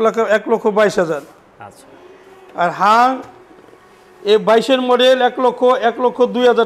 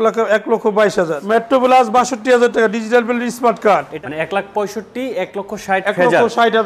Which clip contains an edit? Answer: second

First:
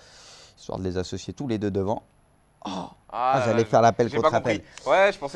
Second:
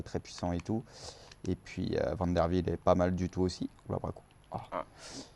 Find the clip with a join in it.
second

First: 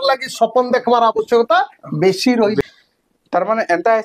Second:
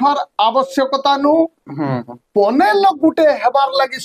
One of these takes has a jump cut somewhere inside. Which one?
first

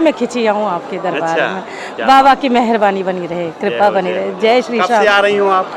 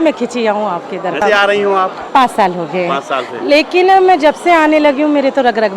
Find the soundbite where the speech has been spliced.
second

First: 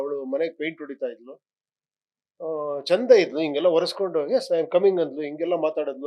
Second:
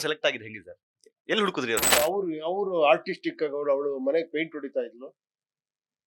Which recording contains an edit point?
second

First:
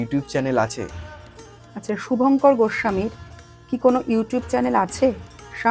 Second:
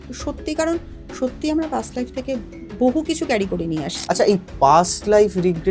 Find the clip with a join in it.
second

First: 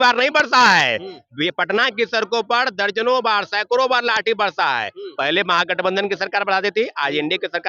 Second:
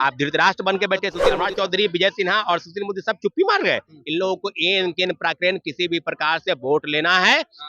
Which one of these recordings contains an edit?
second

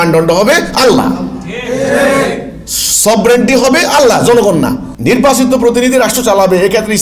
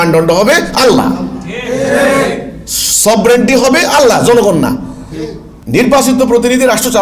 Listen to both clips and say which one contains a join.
first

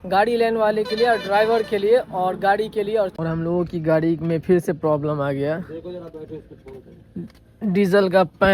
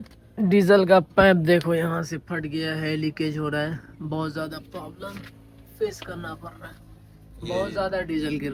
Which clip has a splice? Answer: first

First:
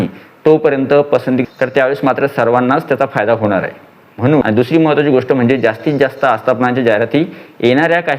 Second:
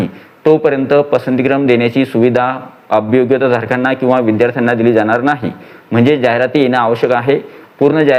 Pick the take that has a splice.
first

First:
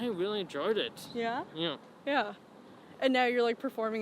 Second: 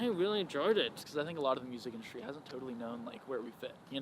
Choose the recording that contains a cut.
second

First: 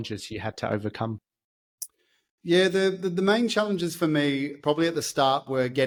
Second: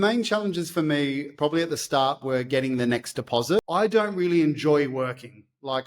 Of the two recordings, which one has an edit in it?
second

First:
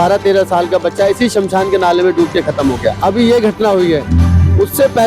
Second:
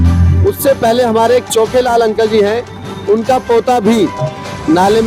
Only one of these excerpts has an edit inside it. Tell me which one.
first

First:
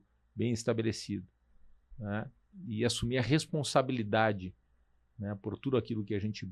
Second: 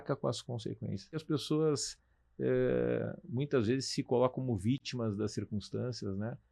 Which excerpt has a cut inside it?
second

